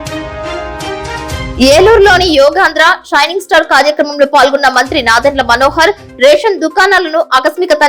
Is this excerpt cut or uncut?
cut